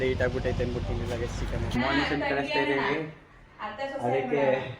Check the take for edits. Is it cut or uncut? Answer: cut